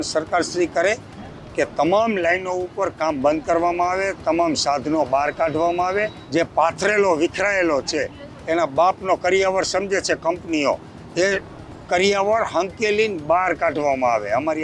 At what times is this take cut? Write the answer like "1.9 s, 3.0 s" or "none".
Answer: 6.2 s